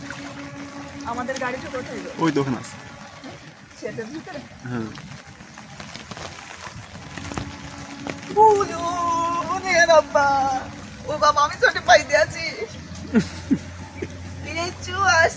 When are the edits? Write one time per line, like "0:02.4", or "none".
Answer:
0:05.4